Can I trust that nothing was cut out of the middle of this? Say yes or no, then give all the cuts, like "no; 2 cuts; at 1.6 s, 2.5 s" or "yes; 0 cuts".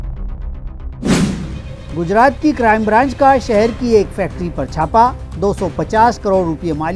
yes; 0 cuts